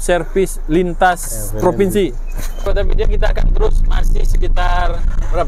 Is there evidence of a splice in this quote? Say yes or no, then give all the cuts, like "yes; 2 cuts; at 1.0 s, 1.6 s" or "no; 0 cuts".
yes; 1 cut; at 2.6 s